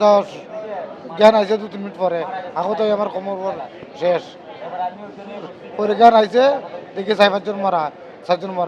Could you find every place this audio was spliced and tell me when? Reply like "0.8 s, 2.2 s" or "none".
none